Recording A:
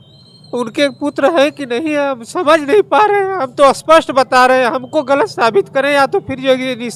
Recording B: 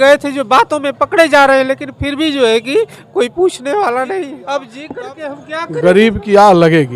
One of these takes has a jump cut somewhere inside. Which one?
B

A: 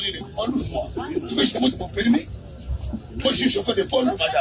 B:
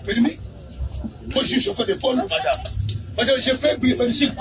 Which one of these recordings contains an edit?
A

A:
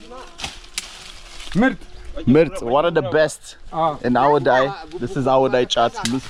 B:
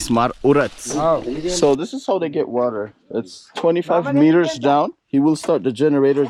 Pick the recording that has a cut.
B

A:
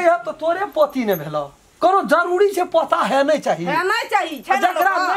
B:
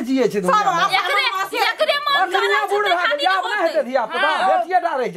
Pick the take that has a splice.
A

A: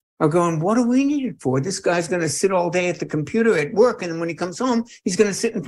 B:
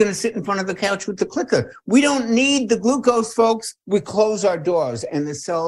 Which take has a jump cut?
B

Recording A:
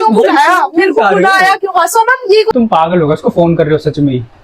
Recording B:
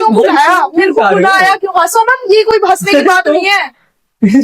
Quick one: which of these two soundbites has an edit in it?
A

